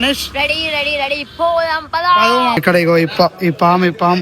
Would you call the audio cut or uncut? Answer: cut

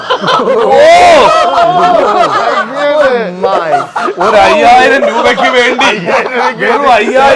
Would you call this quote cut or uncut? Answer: uncut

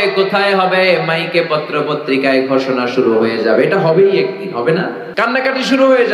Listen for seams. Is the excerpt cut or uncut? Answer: cut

